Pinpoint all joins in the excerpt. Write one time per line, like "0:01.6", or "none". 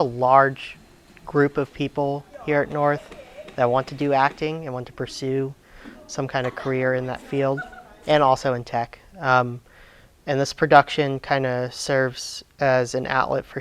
none